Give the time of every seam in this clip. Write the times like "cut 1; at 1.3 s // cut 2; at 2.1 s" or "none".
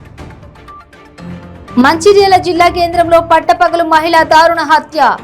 cut 1; at 1.2 s